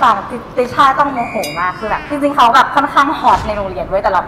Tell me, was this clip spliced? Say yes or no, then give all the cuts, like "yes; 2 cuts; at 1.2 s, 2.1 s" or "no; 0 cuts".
yes; 1 cut; at 2.1 s